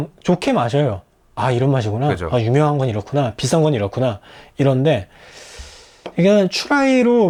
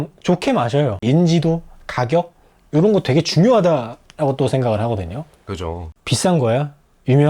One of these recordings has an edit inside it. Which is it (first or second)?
second